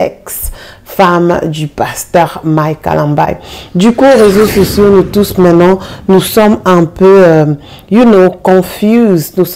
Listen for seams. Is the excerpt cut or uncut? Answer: uncut